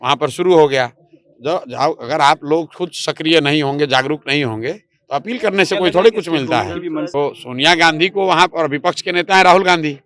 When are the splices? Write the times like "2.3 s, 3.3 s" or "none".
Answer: 7.1 s